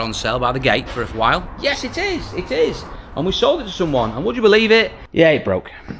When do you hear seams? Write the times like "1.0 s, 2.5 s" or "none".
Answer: 5.0 s